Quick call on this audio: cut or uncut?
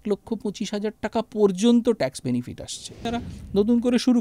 cut